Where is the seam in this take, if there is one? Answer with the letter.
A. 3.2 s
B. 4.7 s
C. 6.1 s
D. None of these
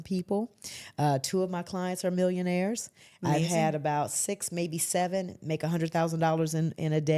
D